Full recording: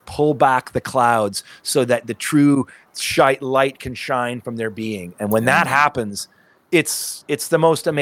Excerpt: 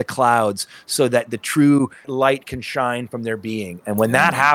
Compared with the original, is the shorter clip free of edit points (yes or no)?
no